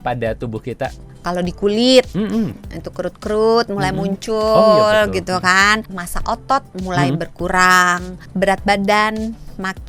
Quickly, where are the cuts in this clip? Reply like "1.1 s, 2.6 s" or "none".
1.1 s, 6.0 s, 8.2 s